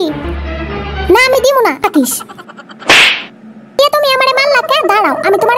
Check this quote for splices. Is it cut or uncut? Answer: cut